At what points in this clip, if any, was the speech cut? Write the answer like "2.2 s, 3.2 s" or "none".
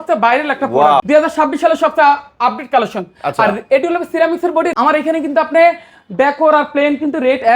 1.0 s, 4.7 s